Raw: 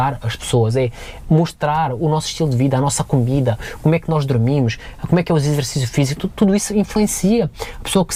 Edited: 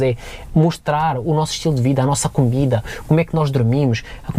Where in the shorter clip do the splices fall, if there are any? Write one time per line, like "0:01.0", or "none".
none